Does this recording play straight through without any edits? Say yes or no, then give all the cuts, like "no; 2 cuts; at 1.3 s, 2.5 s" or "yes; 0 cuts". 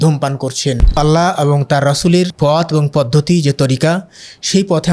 no; 2 cuts; at 1.0 s, 2.3 s